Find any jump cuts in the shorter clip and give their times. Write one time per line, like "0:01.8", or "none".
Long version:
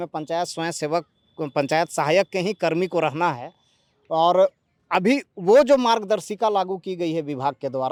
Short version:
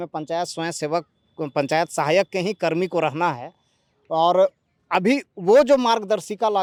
none